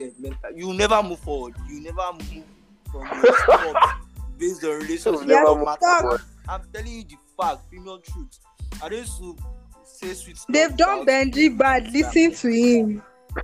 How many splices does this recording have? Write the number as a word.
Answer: zero